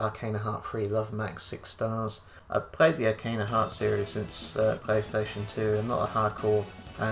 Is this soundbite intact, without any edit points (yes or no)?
no